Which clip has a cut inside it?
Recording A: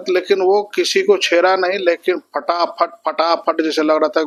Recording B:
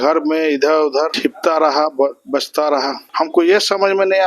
B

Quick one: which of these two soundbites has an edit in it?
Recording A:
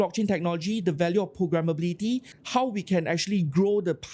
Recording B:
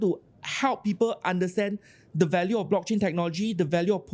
A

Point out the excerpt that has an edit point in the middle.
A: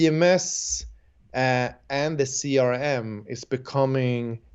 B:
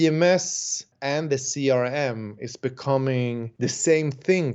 B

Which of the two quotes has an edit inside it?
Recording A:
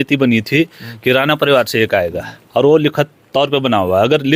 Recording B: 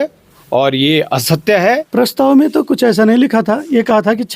B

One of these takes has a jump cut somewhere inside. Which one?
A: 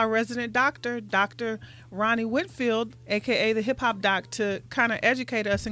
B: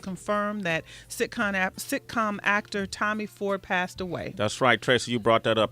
B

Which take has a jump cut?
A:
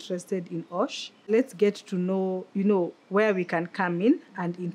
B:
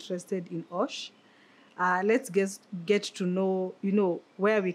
A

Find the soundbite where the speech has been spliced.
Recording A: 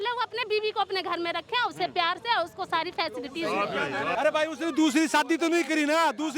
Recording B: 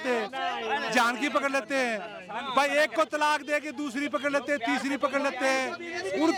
A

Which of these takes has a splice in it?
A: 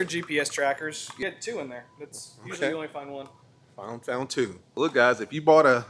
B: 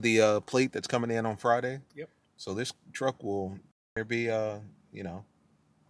A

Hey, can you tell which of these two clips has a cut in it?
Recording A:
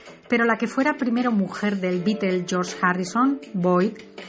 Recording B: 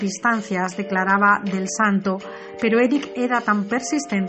A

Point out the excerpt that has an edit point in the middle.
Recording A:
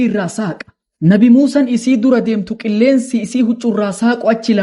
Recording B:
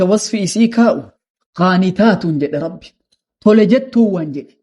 B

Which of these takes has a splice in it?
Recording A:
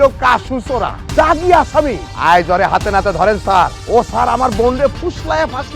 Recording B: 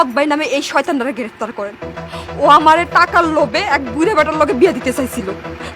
A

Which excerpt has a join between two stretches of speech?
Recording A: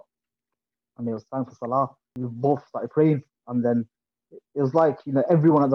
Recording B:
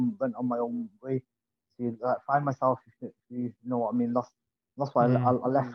A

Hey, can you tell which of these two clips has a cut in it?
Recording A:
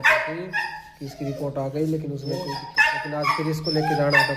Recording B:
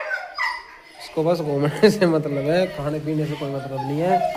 A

